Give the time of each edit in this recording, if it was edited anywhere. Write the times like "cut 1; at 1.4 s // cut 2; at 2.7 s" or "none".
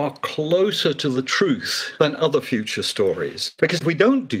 cut 1; at 1.8 s // cut 2; at 3.4 s

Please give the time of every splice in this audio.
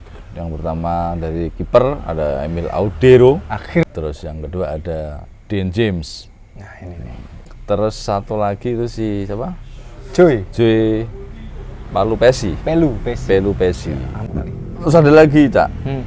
cut 1; at 3.8 s // cut 2; at 7.3 s // cut 3; at 14.3 s

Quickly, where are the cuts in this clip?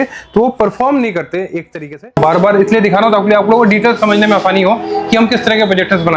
cut 1; at 2.1 s

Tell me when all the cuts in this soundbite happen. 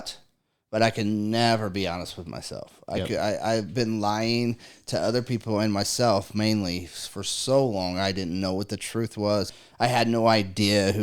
cut 1; at 9.6 s

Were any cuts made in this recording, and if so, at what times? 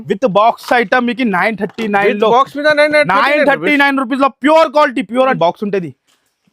cut 1; at 5.2 s

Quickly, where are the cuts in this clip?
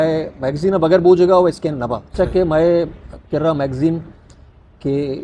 cut 1; at 2.1 s

